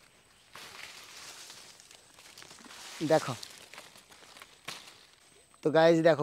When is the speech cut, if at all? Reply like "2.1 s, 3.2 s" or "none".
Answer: 5.3 s